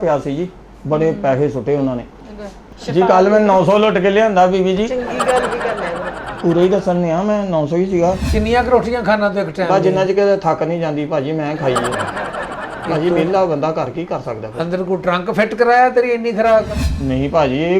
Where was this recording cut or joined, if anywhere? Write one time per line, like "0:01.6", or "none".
0:08.2
0:16.8